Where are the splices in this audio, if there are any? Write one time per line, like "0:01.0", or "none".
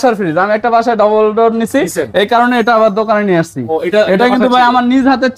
none